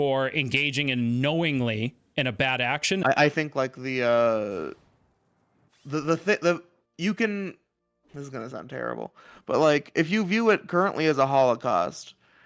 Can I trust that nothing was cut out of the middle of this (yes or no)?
no